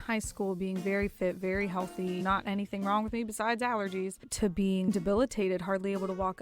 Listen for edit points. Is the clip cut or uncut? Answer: cut